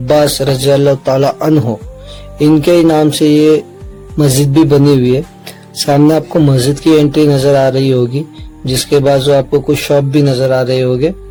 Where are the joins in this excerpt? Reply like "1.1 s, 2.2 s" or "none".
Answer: none